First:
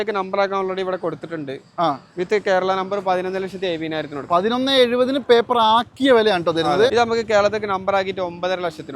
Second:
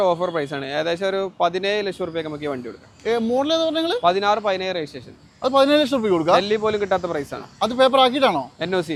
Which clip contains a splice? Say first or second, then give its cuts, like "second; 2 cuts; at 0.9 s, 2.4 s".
first; 1 cut; at 6.9 s